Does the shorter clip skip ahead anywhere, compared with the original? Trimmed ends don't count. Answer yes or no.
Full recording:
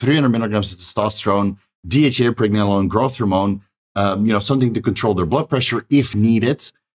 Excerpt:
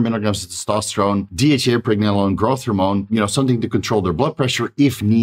yes